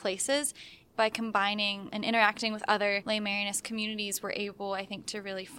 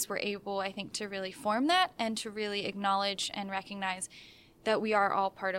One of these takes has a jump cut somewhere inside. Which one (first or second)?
first